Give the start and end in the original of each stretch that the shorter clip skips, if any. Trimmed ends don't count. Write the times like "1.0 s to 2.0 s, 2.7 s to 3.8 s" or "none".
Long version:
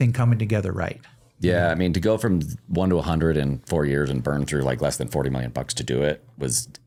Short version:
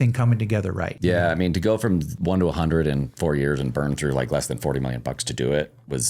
0.9 s to 1.3 s, 2.5 s to 2.6 s